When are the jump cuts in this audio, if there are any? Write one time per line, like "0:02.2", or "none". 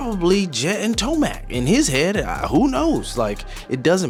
none